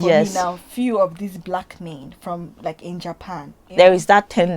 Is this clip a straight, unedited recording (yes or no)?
no